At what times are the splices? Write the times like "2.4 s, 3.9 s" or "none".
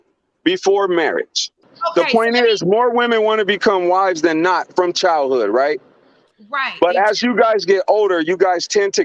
1.7 s